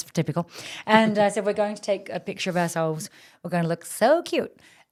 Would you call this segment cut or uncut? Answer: uncut